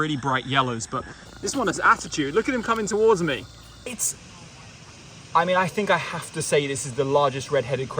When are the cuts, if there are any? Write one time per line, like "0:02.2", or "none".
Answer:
0:01.2
0:03.9